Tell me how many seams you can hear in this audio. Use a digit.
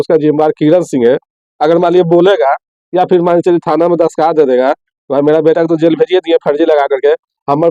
0